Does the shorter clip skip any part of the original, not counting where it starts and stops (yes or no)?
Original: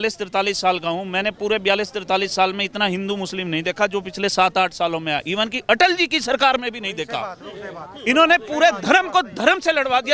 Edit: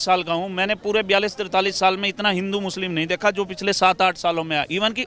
no